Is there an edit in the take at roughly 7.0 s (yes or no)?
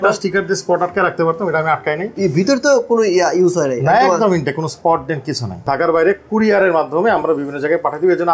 no